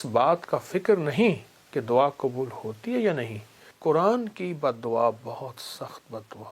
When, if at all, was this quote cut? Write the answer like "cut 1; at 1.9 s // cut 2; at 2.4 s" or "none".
cut 1; at 3.7 s